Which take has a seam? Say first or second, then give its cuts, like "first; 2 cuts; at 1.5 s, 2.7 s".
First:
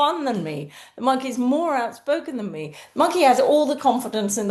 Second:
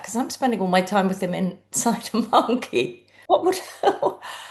second; 1 cut; at 3.1 s